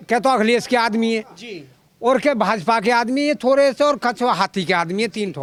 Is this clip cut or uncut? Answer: uncut